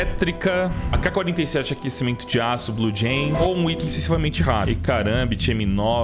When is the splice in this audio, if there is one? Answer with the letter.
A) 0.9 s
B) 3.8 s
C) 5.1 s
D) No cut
A